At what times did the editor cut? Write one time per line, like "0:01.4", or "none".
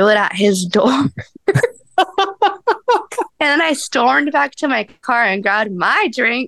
0:03.3